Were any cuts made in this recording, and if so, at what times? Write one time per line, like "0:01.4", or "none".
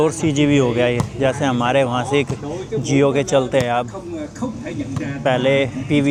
none